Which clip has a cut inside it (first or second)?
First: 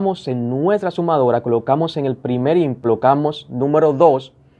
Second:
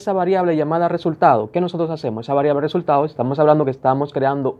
first